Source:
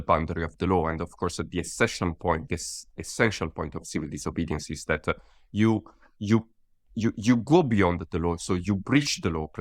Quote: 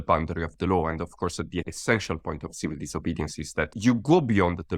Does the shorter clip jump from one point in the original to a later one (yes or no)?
yes